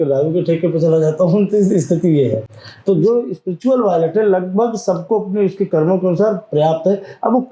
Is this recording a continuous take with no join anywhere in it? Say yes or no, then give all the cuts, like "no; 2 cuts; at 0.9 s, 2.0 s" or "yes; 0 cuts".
yes; 0 cuts